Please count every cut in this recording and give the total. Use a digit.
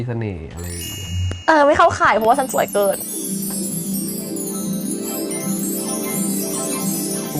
1